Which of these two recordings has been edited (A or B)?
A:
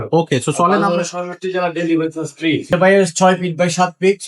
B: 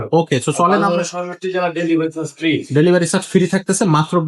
A